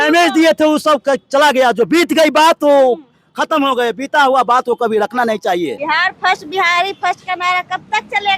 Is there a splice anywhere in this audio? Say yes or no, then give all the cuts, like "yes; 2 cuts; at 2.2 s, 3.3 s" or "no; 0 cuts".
yes; 1 cut; at 5.8 s